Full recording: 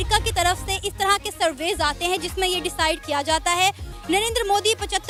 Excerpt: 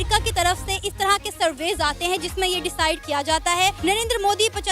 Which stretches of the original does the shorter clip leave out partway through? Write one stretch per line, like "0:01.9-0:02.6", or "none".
0:03.8-0:04.0